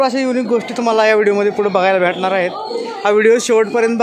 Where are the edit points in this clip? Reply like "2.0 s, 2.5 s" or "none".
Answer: none